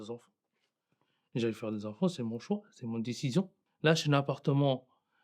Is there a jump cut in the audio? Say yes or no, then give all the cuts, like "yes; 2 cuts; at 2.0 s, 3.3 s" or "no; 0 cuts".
yes; 1 cut; at 3.6 s